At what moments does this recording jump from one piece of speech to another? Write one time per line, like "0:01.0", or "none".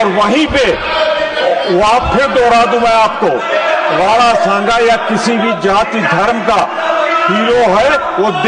none